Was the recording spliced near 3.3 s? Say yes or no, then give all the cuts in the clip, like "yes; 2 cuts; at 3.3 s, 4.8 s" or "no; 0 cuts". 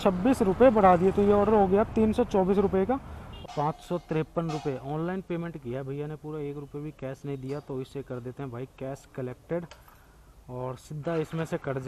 yes; 1 cut; at 3.3 s